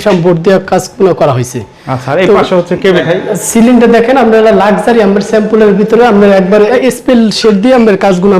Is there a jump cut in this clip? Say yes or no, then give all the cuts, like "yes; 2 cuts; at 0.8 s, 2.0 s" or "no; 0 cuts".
yes; 2 cuts; at 3.0 s, 6.7 s